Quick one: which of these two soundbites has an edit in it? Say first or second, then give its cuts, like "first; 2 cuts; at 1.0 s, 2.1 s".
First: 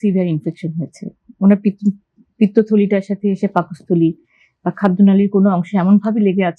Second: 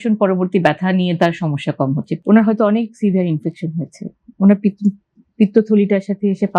second; 1 cut; at 2.1 s